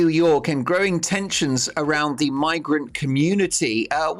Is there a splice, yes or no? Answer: no